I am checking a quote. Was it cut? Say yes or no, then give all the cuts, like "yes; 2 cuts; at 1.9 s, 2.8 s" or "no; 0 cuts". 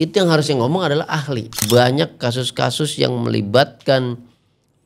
yes; 1 cut; at 1.5 s